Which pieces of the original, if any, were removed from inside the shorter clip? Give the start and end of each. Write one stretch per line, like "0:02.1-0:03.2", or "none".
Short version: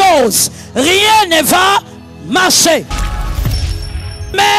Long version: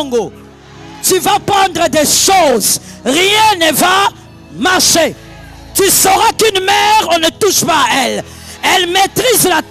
none